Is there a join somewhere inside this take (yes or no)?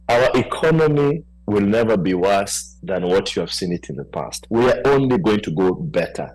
no